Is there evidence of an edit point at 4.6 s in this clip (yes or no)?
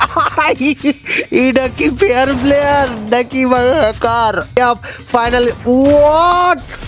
yes